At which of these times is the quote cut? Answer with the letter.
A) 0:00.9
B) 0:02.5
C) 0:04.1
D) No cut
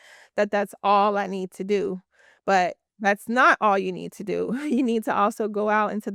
D